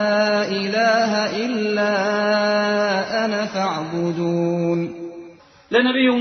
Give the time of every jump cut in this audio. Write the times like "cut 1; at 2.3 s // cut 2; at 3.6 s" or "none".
none